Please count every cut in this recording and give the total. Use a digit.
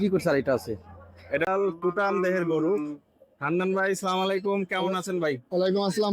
1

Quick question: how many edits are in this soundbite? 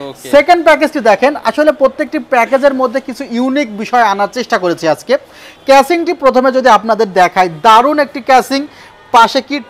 0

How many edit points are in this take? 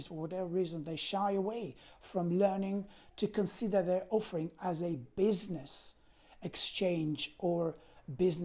0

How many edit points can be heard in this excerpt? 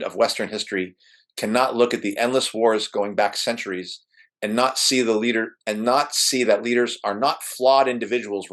0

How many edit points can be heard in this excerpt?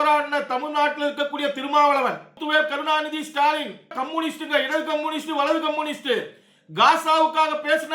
2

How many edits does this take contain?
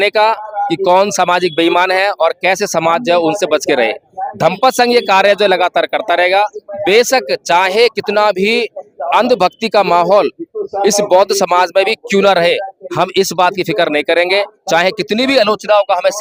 0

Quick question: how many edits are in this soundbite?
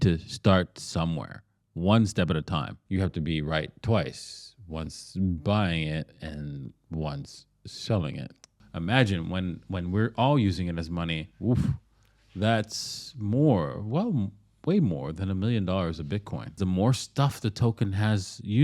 3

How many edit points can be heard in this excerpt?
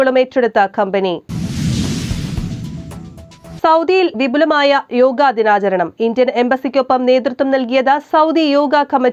2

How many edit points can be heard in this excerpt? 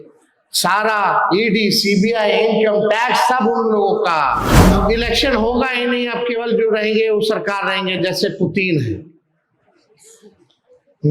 1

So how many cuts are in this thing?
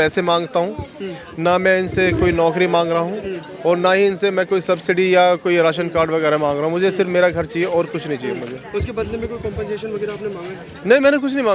0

